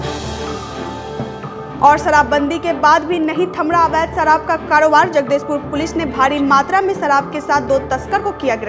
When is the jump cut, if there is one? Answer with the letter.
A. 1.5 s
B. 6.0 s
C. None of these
A